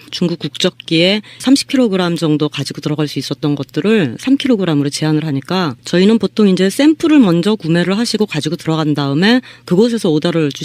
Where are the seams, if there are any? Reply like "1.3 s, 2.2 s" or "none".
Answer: 9.3 s